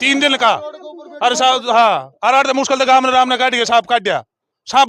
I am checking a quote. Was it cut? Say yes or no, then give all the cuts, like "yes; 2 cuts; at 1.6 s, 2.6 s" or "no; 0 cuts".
no; 0 cuts